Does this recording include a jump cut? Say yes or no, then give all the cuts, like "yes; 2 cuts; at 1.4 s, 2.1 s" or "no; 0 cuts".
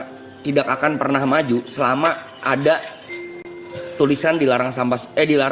no; 0 cuts